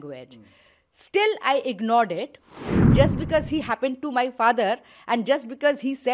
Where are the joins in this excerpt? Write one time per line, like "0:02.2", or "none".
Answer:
0:02.7